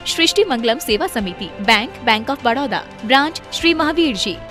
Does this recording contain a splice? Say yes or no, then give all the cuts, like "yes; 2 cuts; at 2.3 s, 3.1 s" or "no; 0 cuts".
no; 0 cuts